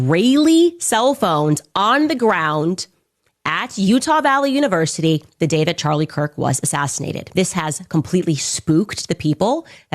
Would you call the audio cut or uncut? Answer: cut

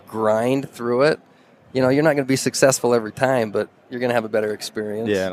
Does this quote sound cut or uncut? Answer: uncut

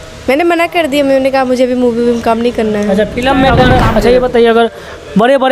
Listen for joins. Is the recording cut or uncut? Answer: cut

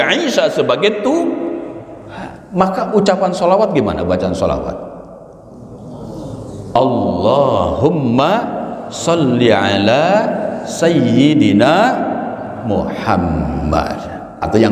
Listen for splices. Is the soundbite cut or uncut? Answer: uncut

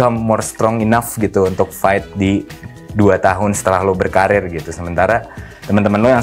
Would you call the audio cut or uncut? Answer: uncut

